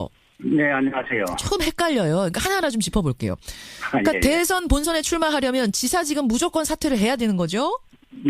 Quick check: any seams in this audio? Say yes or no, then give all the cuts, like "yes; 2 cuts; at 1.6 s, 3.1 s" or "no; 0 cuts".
yes; 1 cut; at 6.4 s